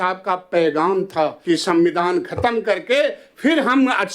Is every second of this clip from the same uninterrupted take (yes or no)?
no